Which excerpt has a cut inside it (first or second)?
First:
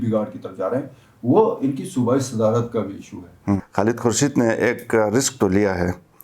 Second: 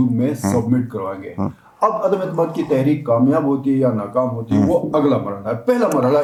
first